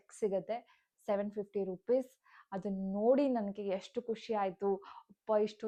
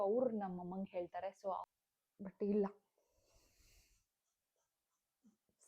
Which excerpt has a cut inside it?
second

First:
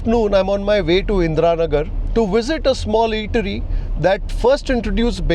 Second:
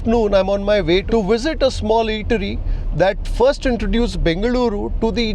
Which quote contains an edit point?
second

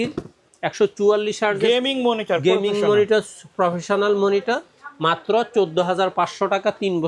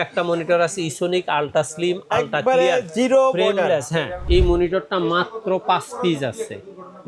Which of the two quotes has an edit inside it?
second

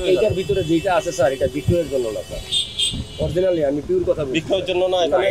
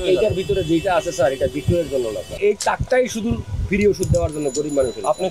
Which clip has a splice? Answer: second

